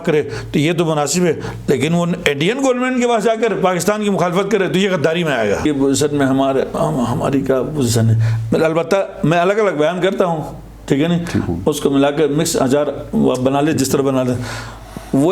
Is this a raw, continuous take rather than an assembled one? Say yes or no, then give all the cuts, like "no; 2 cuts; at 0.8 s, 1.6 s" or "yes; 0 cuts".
no; 1 cut; at 5.6 s